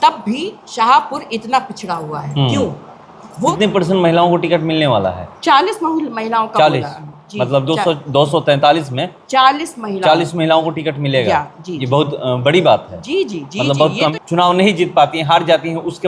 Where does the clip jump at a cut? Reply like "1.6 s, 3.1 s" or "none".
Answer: 3.5 s, 14.1 s

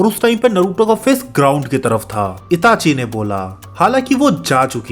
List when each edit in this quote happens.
2.4 s

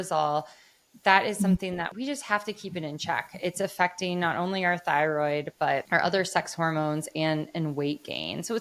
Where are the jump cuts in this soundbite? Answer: 1.9 s, 5.8 s

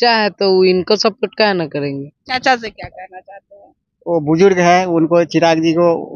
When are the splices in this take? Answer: 2.1 s

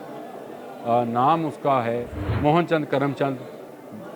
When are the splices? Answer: 2.2 s

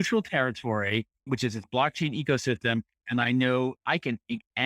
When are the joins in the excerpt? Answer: 1.2 s

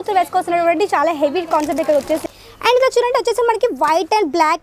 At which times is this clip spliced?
2.3 s

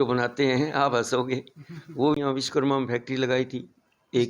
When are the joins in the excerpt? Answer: 2.2 s

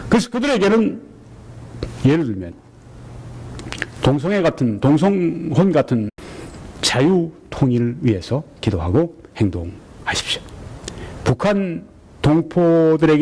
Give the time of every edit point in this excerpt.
none

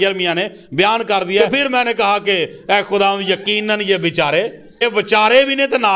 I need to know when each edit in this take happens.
1.4 s

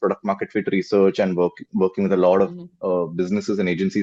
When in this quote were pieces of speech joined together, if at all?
none

